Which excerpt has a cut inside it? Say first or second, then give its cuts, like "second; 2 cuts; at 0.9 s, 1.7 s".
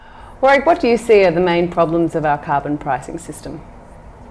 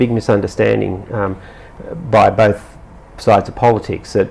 second; 1 cut; at 2.4 s